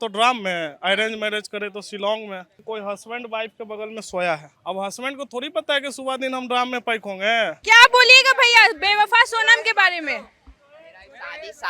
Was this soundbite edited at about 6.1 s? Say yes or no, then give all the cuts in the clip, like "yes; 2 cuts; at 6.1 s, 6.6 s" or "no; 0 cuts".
no; 3 cuts; at 2.6 s, 4.5 s, 7.6 s